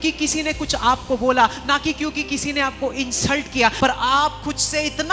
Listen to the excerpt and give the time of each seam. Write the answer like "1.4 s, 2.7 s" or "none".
3.8 s

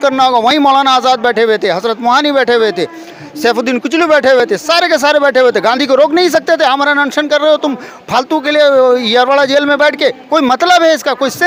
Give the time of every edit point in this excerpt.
none

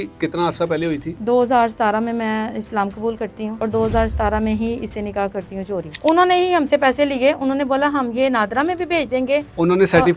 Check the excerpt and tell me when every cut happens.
1.1 s, 3.6 s, 5.9 s

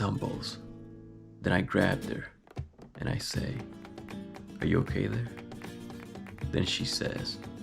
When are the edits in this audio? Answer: none

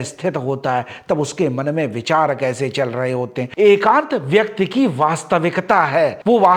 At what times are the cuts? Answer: 3.5 s

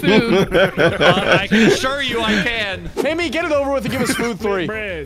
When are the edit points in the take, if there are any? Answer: 2.8 s

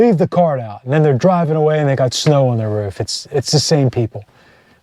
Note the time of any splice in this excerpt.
none

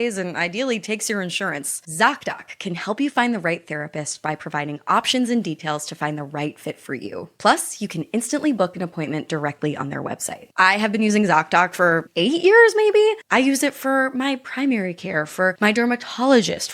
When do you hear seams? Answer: 1.7 s, 10.4 s, 12.1 s

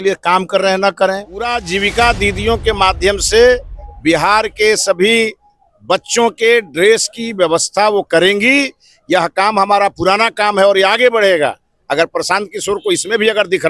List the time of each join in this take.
1.5 s

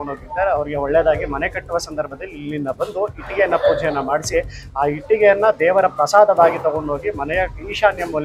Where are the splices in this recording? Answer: none

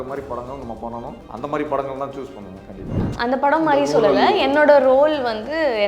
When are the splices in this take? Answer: 1.2 s, 3.1 s

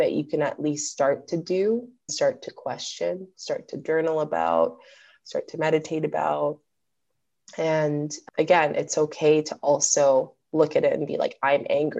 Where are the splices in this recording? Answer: 2.0 s

